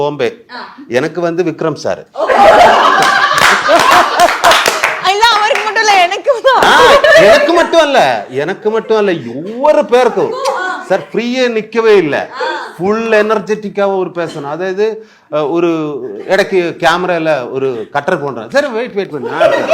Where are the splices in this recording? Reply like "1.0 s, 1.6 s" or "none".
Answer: none